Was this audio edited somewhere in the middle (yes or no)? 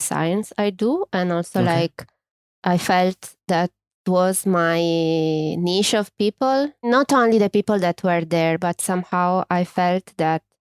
no